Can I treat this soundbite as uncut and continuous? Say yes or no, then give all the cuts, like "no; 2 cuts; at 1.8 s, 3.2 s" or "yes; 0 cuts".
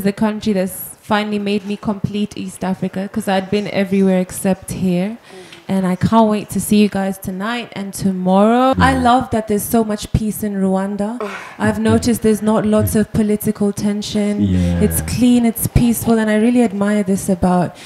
no; 1 cut; at 8.7 s